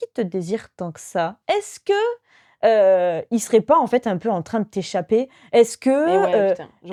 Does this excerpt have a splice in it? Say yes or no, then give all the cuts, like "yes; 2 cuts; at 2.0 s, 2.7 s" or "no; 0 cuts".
no; 0 cuts